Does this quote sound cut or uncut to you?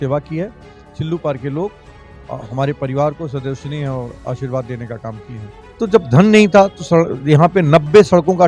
cut